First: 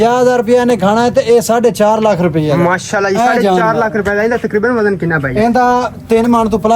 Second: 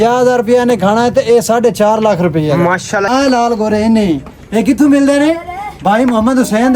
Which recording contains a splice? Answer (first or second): second